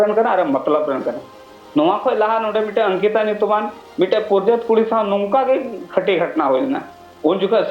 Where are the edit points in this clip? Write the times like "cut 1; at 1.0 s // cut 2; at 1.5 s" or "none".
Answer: none